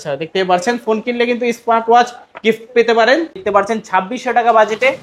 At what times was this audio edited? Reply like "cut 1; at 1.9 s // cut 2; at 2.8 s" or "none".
cut 1; at 3.4 s

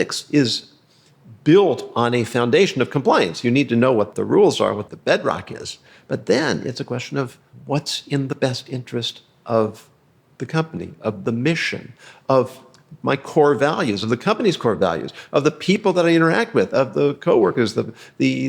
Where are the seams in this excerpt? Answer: cut 1; at 4.1 s // cut 2; at 4.9 s // cut 3; at 7.5 s

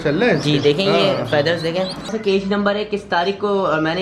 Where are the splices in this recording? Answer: cut 1; at 2.1 s

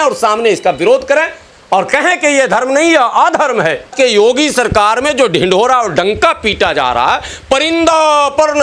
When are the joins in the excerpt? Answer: cut 1; at 3.9 s

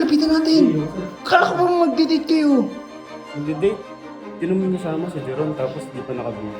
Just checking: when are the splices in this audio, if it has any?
cut 1; at 1.2 s

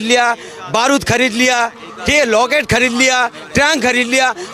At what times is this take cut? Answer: none

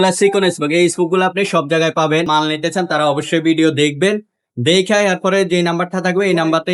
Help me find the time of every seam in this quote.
cut 1; at 2.3 s

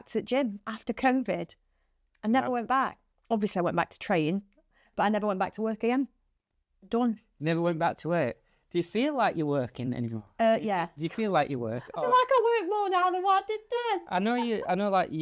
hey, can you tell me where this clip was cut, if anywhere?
none

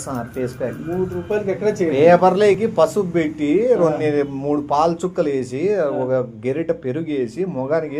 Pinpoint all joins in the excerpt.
none

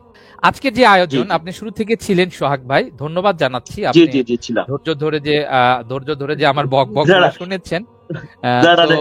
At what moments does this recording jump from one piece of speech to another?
none

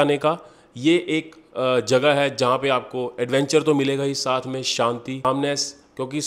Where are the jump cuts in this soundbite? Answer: cut 1; at 5.2 s

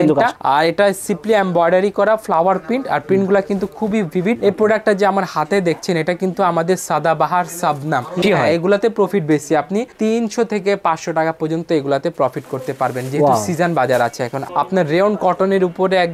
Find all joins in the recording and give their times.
cut 1; at 4.4 s // cut 2; at 8.2 s // cut 3; at 14.5 s

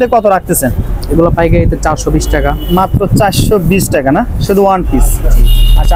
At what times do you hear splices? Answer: none

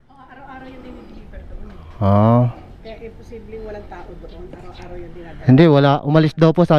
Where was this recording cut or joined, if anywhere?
none

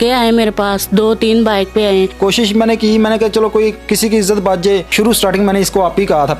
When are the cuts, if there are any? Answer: cut 1; at 2.1 s // cut 2; at 4.9 s

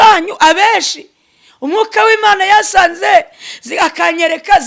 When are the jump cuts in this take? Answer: none

